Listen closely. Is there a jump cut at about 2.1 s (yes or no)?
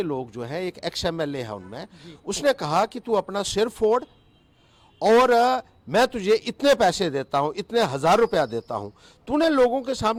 no